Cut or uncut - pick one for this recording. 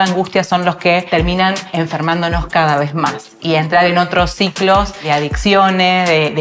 cut